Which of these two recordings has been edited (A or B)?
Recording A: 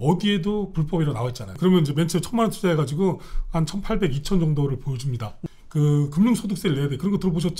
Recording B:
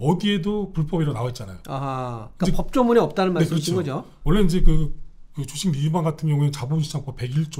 A